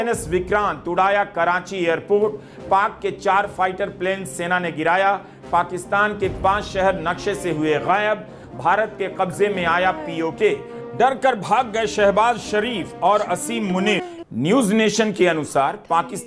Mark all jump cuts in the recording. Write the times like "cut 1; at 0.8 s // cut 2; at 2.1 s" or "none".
cut 1; at 14.2 s

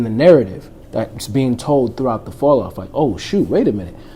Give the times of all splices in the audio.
none

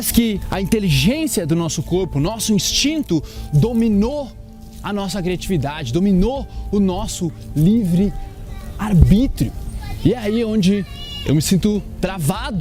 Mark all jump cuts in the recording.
none

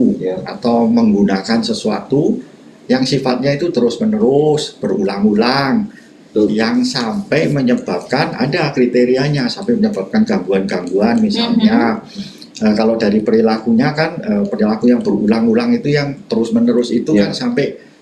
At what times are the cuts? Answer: none

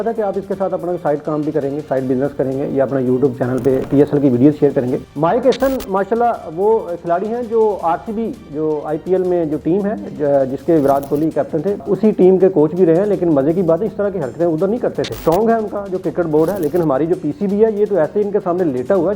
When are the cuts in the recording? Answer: cut 1; at 5.1 s // cut 2; at 11.8 s // cut 3; at 15.1 s

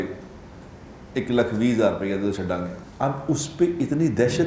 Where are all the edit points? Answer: cut 1; at 2.8 s

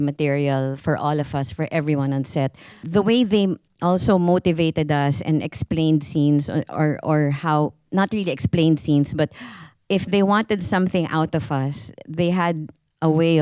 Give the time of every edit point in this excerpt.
cut 1; at 2.8 s

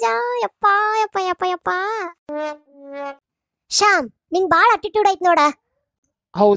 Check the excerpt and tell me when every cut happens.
cut 1; at 3.2 s

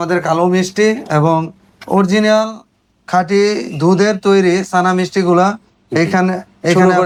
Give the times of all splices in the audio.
none

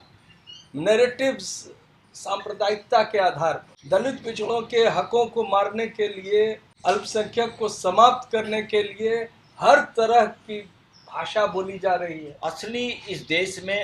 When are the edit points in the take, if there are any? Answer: cut 1; at 3.7 s // cut 2; at 6.7 s // cut 3; at 12.3 s

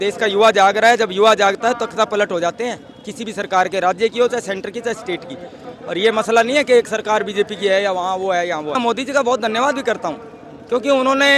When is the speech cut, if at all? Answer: none

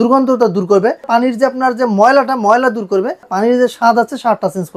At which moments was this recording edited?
cut 1; at 1.1 s // cut 2; at 3.3 s

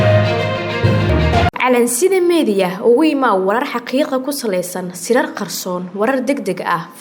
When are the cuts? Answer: cut 1; at 1.5 s

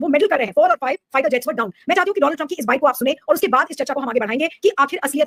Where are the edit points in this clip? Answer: none

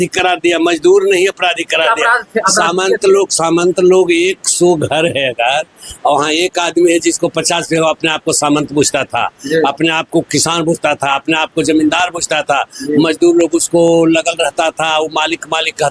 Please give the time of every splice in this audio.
none

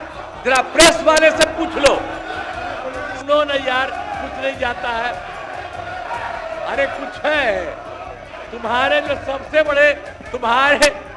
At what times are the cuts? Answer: cut 1; at 3.1 s

